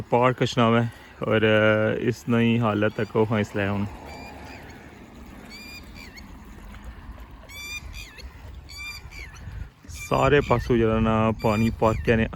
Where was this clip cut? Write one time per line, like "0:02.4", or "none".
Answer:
none